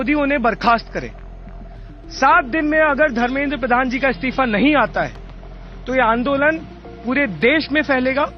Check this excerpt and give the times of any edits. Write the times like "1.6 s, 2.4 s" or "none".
none

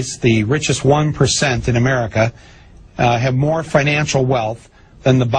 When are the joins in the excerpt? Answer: none

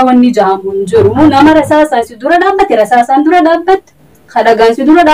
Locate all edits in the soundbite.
none

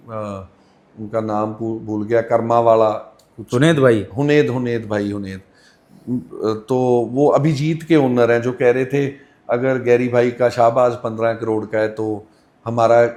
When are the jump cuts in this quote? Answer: none

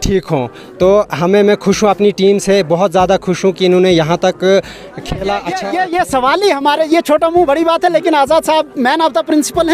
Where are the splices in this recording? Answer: 5.5 s

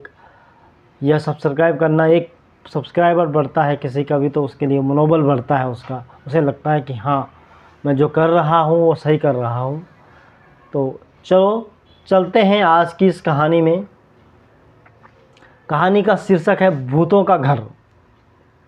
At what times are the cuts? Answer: none

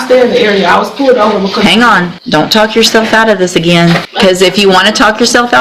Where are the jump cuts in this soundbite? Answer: 2.1 s, 4.1 s

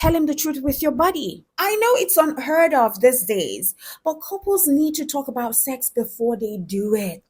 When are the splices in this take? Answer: 1.4 s

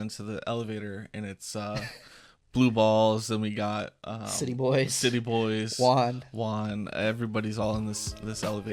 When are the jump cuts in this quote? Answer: none

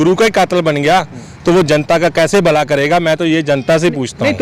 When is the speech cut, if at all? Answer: none

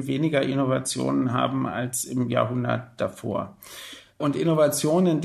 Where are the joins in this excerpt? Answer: none

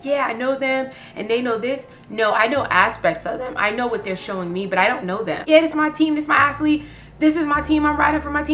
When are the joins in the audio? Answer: 5.4 s

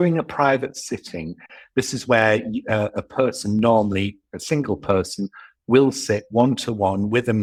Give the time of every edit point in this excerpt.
none

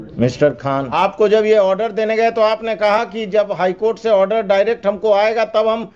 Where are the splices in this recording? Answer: 1.0 s

